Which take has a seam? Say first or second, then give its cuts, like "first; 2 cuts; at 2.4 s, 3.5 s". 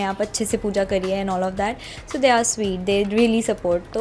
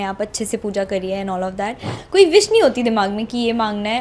second; 1 cut; at 1.9 s